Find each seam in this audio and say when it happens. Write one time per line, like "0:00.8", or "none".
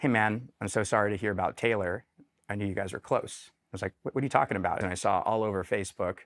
0:03.6
0:04.8

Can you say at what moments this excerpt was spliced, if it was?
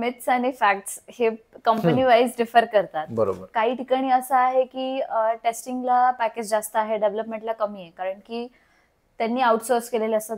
none

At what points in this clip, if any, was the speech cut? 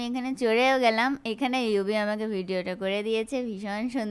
none

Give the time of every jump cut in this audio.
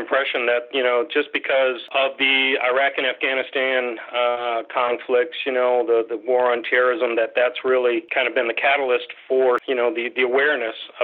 0:01.8
0:08.1
0:09.6

